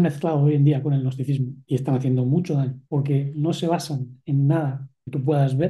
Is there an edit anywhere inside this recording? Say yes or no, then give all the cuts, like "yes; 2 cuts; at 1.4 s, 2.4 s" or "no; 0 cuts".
yes; 2 cuts; at 1.5 s, 2.8 s